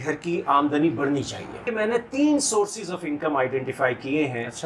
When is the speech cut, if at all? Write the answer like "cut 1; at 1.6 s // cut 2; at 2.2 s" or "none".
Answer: cut 1; at 1.6 s